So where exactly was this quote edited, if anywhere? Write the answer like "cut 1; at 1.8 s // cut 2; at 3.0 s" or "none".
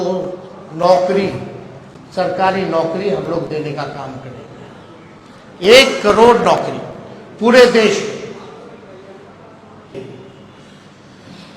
cut 1; at 9.9 s